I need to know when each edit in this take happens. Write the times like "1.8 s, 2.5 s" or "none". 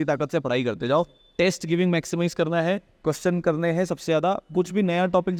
none